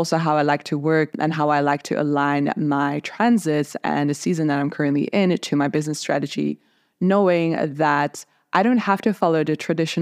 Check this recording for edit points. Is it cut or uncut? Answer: cut